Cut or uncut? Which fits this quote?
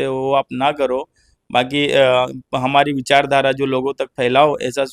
uncut